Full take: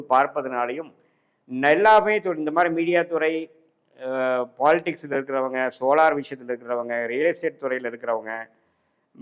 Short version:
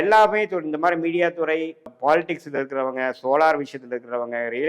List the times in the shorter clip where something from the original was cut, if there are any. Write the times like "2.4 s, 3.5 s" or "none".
1.9 s